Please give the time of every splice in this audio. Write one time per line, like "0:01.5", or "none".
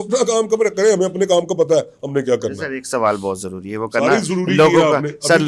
none